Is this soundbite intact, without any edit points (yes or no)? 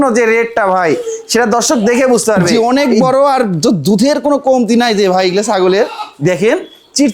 no